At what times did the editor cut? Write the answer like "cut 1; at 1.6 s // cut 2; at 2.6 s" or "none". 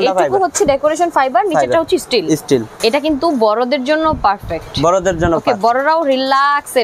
cut 1; at 2.7 s

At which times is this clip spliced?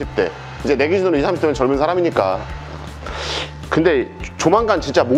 cut 1; at 2.6 s

